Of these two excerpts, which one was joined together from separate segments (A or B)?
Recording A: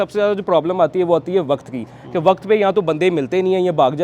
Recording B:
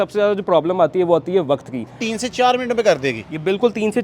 B